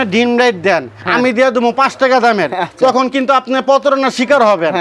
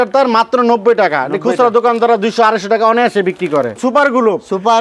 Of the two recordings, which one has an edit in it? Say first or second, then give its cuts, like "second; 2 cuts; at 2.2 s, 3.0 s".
second; 1 cut; at 3.8 s